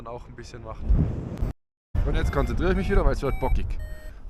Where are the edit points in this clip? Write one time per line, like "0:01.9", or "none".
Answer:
0:01.5